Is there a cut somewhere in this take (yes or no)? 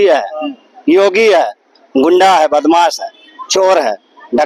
no